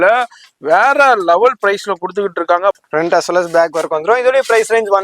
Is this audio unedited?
no; 1 cut; at 2.8 s

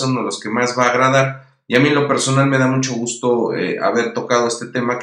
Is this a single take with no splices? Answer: no; 1 cut; at 3.9 s

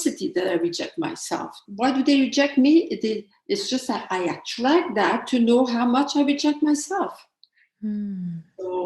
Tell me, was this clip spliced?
yes; 1 cut; at 1.6 s

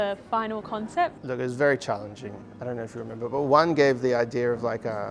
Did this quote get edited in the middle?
yes; 1 cut; at 1.2 s

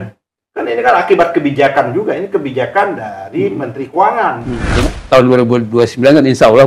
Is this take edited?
yes; 1 cut; at 4.9 s

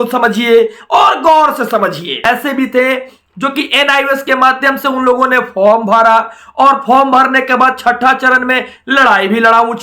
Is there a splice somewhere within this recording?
yes; 1 cut; at 2.2 s

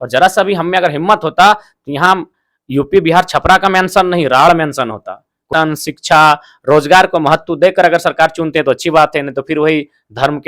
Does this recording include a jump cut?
yes; 1 cut; at 5.5 s

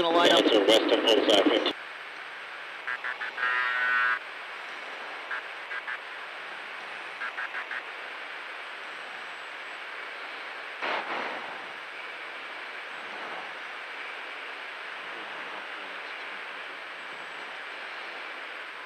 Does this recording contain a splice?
no; 0 cuts

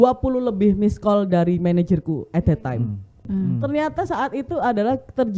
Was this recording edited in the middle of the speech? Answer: yes; 1 cut; at 3.2 s

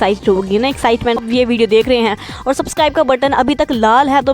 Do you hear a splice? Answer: yes; 1 cut; at 1.2 s

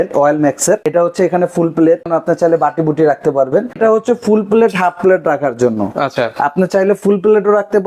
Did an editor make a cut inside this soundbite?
yes; 3 cuts; at 0.8 s, 2.1 s, 3.8 s

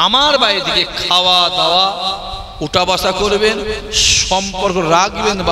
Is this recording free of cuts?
yes; 0 cuts

